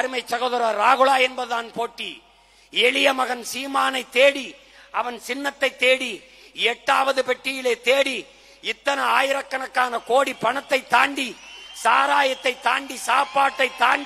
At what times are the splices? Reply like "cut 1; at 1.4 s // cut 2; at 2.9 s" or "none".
none